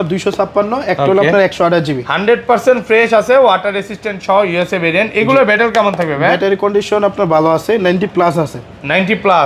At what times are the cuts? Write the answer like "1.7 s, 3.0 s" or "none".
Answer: none